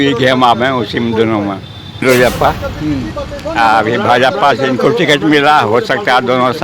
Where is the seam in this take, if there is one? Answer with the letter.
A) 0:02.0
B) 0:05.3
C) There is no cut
A